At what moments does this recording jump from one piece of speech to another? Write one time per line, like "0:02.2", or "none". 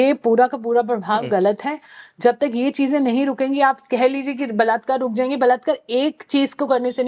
none